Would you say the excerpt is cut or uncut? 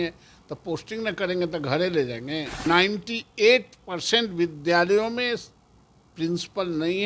cut